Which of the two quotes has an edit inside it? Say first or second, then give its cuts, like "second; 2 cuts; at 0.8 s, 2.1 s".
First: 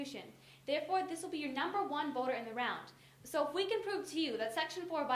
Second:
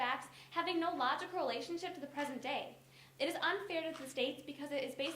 second; 1 cut; at 4.0 s